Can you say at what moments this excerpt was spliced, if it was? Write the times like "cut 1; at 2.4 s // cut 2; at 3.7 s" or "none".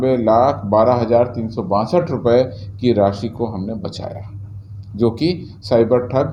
none